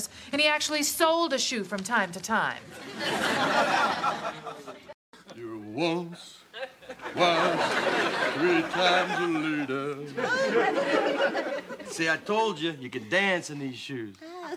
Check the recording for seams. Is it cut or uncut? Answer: cut